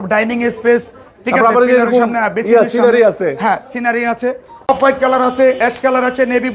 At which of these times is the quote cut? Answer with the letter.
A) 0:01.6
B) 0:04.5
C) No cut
B